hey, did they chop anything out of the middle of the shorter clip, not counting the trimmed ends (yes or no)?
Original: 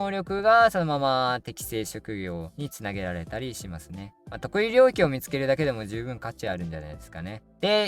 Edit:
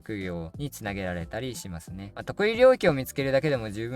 yes